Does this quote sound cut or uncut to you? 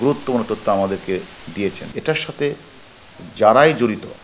cut